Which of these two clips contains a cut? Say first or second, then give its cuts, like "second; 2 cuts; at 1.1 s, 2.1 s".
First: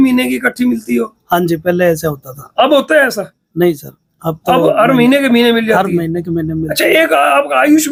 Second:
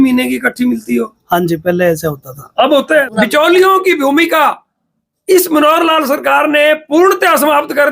second; 1 cut; at 3.1 s